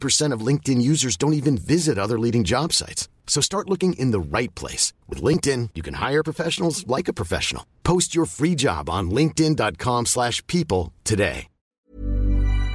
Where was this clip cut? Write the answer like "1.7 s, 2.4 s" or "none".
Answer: 11.8 s